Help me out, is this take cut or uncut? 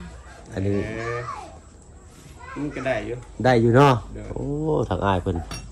uncut